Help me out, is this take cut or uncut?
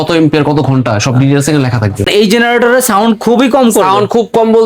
cut